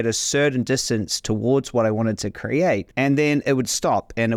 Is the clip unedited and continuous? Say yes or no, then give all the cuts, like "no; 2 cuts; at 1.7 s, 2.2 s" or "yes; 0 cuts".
no; 1 cut; at 2.9 s